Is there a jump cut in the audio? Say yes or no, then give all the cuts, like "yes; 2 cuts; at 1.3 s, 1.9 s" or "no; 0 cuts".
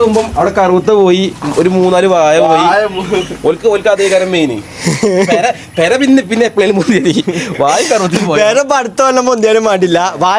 no; 0 cuts